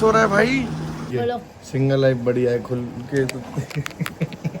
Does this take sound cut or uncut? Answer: cut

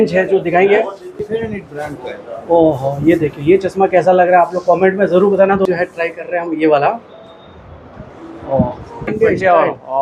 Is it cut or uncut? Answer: cut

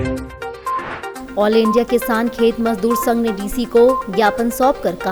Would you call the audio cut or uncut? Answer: uncut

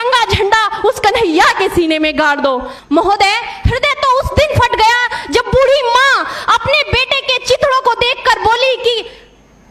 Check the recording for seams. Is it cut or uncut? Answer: cut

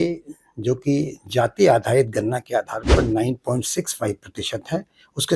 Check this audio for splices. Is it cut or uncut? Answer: uncut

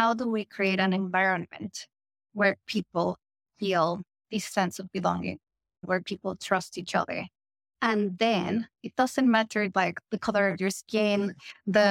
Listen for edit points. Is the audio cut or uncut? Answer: cut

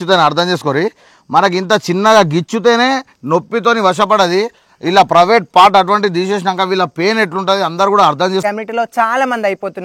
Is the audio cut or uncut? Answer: cut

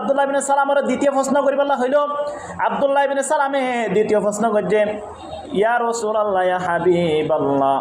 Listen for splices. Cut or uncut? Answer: uncut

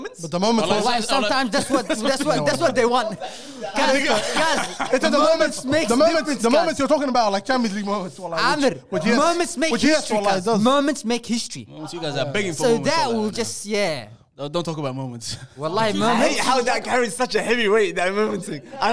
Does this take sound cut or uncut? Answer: uncut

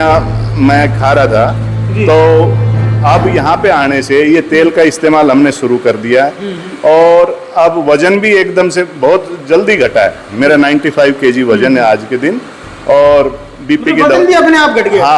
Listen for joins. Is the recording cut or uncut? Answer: uncut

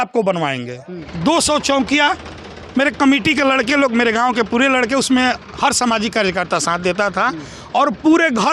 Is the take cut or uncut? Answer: cut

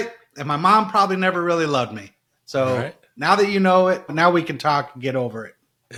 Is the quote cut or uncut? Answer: uncut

